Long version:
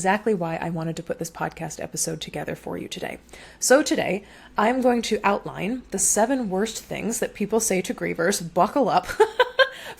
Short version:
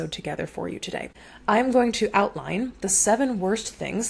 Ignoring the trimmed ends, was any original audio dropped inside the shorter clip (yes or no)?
yes